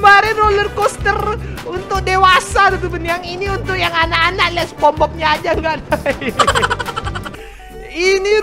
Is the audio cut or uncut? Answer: cut